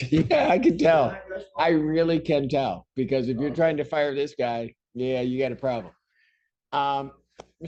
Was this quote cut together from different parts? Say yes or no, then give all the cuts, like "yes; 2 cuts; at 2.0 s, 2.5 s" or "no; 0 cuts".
no; 0 cuts